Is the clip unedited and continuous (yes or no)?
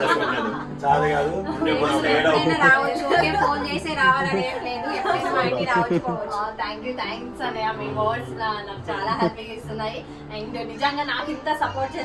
yes